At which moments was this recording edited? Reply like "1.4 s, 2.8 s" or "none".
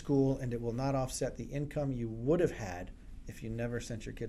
none